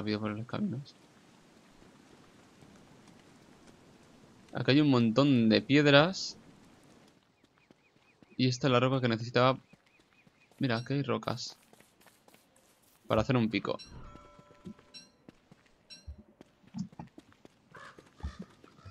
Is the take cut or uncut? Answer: cut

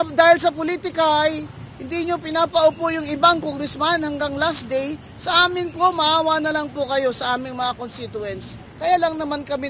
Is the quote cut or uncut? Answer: cut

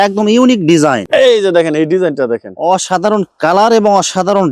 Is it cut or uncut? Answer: cut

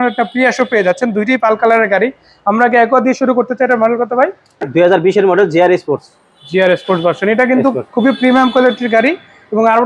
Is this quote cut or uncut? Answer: cut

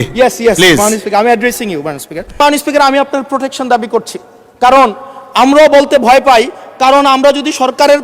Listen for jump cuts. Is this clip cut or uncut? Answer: cut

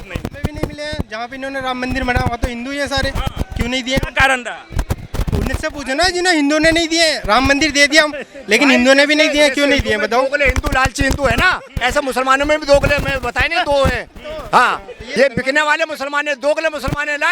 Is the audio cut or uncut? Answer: cut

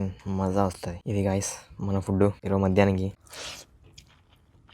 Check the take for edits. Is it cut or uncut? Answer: cut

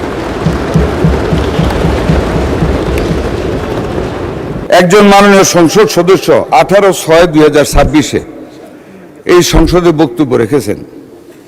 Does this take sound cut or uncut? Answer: cut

